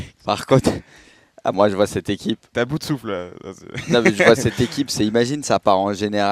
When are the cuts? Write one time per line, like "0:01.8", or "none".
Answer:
none